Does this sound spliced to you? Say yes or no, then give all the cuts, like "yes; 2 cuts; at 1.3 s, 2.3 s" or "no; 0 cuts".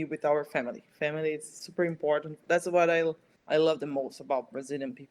yes; 1 cut; at 3.3 s